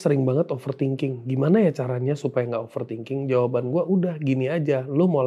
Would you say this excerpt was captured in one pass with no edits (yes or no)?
yes